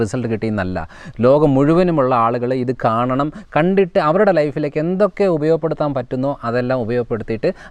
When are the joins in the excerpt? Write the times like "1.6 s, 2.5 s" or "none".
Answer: none